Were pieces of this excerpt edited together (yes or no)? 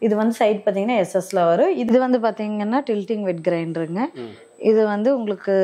yes